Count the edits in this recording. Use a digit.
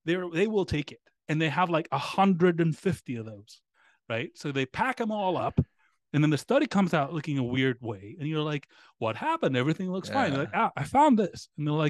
0